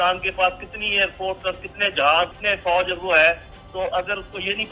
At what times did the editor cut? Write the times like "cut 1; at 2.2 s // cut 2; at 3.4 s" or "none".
cut 1; at 2.4 s